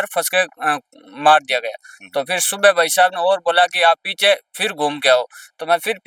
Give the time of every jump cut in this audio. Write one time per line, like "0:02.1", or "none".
none